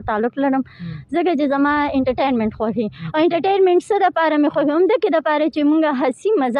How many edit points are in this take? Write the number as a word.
zero